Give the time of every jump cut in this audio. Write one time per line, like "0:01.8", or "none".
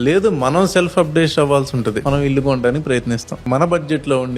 0:02.0
0:03.4